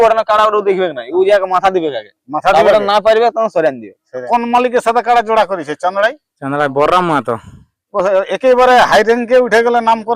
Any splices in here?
yes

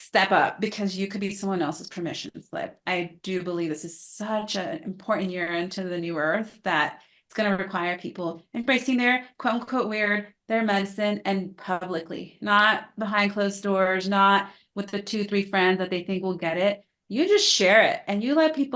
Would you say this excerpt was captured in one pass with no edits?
yes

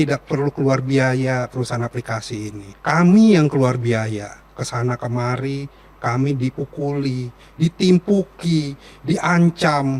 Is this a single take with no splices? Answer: no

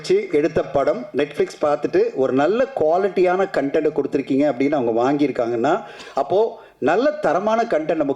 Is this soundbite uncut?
yes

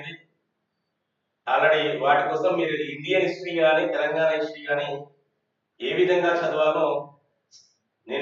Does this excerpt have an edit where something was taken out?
no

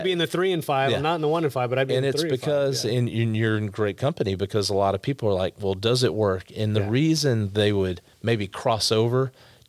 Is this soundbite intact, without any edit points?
yes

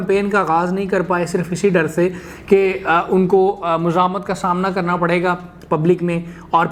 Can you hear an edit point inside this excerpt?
no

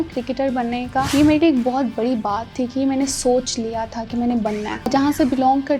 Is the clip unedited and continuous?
no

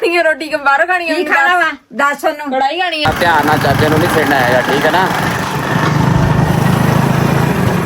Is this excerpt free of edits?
no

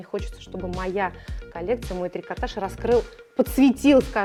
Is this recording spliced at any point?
no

